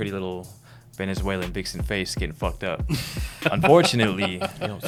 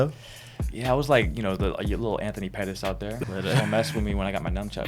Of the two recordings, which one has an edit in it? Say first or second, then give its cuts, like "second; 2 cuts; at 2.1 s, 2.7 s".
second; 1 cut; at 3.2 s